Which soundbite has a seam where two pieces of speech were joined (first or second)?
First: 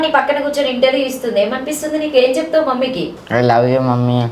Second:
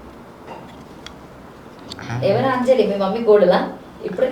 first